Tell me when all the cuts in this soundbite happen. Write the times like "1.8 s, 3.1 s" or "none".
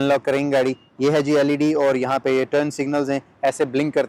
none

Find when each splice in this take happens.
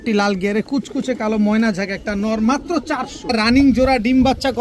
3.3 s

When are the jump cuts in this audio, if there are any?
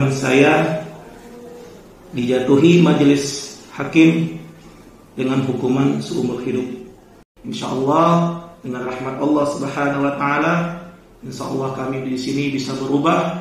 7.6 s

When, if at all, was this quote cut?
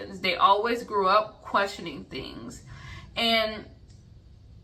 none

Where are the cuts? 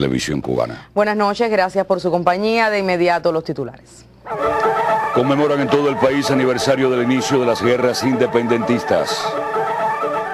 none

